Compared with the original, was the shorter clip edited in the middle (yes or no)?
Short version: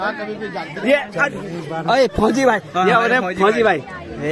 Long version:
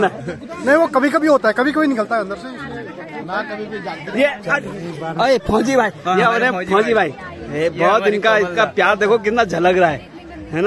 no